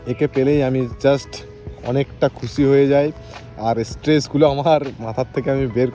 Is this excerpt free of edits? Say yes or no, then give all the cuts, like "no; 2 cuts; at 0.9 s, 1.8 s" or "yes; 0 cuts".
yes; 0 cuts